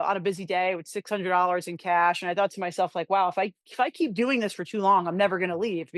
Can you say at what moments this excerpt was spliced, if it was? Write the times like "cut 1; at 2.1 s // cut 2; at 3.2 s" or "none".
none